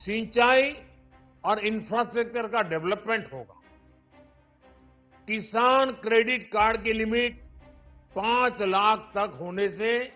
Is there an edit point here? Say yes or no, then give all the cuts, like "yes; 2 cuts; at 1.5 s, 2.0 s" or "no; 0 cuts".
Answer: yes; 2 cuts; at 3.6 s, 5.2 s